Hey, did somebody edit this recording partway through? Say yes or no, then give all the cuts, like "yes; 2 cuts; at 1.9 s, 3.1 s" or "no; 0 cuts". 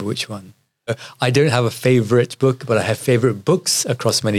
yes; 1 cut; at 1.0 s